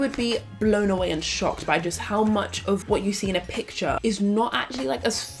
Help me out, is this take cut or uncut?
cut